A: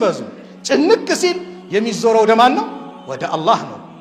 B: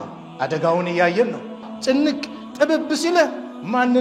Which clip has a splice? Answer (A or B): B